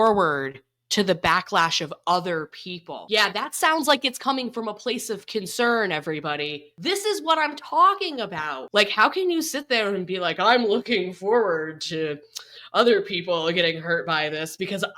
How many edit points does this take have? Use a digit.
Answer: 1